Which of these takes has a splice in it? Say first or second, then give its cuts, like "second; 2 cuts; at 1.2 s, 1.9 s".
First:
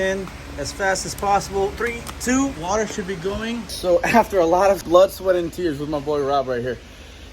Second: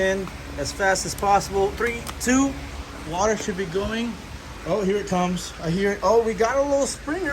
first; 3 cuts; at 2.6 s, 3.8 s, 4.8 s